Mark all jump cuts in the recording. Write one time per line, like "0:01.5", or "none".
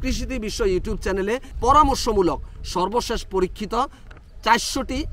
0:01.5